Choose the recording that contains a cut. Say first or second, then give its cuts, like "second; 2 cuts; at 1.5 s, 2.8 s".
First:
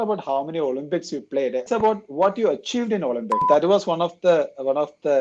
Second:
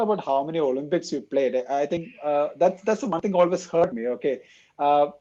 first; 2 cuts; at 1.6 s, 3.4 s